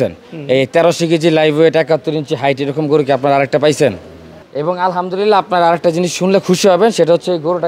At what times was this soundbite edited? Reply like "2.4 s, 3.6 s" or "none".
4.4 s